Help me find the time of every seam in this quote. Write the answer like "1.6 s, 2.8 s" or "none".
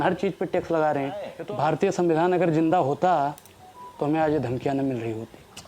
1.3 s